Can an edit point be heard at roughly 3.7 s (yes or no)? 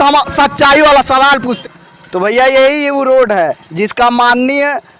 no